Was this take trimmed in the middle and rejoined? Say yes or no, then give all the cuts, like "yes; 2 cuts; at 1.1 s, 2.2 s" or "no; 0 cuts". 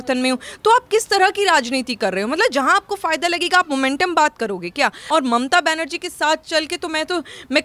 yes; 1 cut; at 5.0 s